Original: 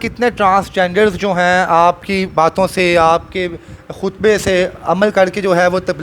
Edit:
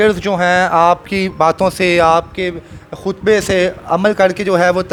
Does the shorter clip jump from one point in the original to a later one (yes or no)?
no